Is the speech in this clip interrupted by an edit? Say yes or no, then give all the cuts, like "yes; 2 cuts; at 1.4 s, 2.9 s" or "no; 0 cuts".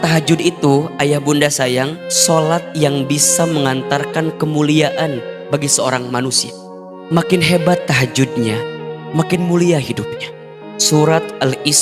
no; 0 cuts